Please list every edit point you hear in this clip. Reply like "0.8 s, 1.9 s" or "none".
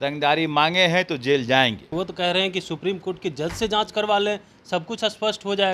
1.9 s